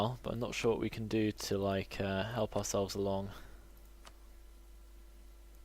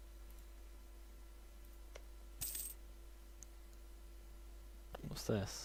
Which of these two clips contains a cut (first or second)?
first